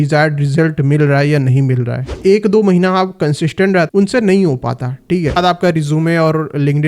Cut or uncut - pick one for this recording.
cut